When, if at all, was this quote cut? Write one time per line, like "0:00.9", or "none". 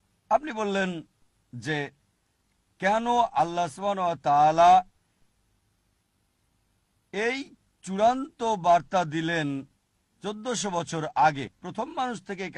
none